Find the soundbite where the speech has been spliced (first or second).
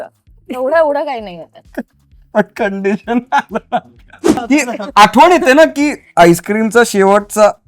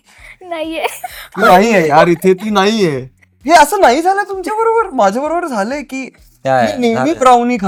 first